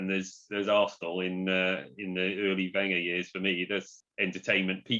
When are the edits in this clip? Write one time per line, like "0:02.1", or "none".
0:04.0